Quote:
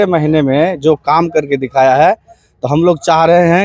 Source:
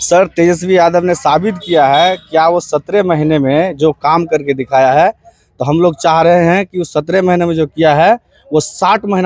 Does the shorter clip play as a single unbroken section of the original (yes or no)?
yes